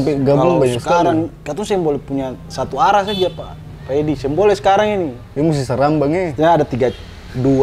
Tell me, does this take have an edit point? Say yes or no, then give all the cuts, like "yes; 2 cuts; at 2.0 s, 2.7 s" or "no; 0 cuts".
no; 0 cuts